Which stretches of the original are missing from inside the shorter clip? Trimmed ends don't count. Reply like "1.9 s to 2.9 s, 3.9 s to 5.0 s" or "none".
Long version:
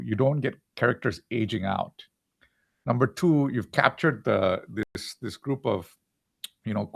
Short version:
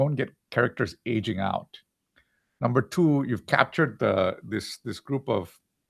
5.0 s to 5.1 s